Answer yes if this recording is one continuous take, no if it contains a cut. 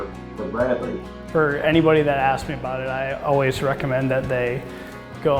no